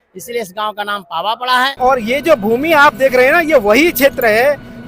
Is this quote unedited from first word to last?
no; 1 cut; at 1.7 s

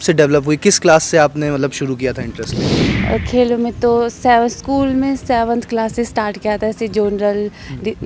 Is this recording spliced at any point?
no; 0 cuts

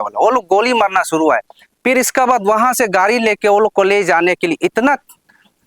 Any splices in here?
no; 0 cuts

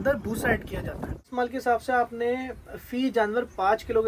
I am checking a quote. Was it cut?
yes; 1 cut; at 1.3 s

